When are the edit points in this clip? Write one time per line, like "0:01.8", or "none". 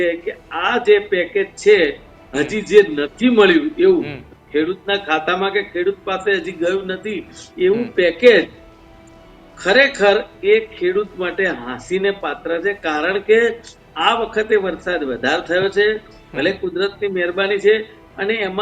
none